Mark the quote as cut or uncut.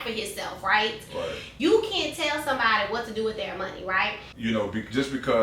cut